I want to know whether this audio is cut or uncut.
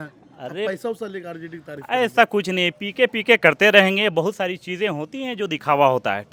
uncut